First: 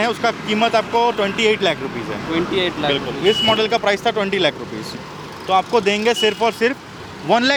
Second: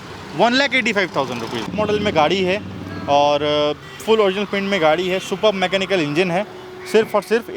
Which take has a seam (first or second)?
second